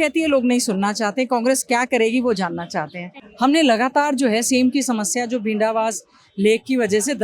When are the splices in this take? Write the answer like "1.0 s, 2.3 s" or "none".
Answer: 3.2 s